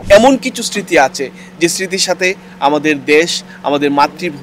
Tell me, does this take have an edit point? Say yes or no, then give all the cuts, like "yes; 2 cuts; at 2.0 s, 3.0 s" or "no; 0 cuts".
no; 0 cuts